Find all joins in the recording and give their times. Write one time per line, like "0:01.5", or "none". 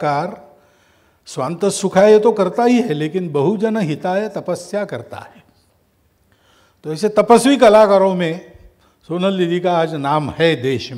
none